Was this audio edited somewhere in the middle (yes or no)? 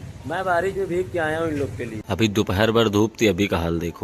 yes